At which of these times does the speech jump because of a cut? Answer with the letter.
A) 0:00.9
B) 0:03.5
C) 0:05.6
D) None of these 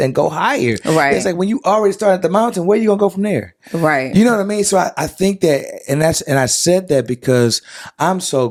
D